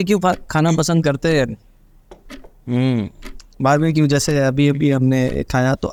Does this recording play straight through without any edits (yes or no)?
yes